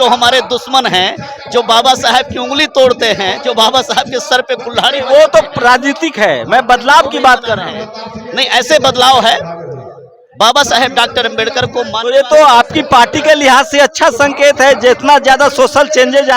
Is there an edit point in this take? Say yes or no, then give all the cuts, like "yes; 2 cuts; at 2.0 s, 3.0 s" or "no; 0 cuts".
no; 0 cuts